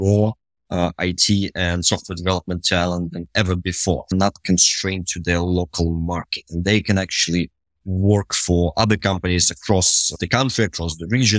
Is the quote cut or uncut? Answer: cut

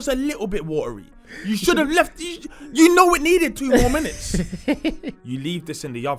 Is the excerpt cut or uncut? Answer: cut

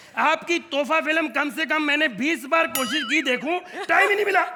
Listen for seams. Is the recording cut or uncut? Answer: uncut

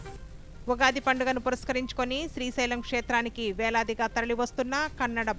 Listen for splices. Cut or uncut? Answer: uncut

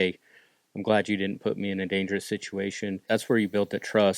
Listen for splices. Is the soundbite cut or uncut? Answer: cut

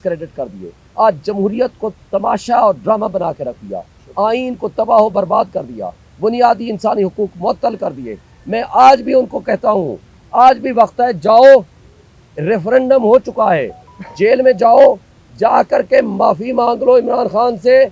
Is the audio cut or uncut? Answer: uncut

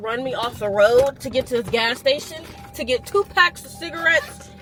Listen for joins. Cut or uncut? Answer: uncut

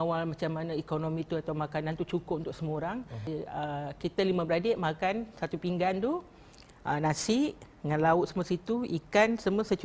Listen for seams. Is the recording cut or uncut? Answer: cut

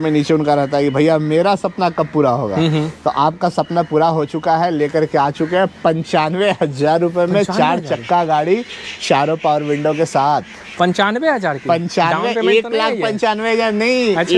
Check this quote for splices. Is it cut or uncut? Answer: uncut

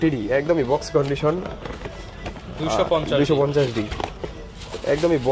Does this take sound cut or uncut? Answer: uncut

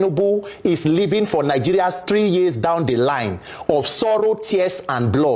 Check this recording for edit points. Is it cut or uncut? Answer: uncut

